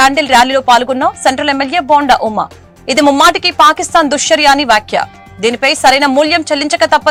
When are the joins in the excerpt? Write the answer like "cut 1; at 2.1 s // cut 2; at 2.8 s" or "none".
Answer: none